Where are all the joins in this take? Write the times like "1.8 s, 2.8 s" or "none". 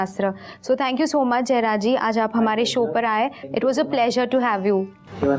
3.4 s